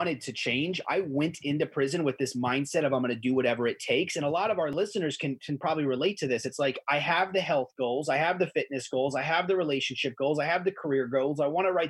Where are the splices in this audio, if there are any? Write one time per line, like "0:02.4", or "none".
none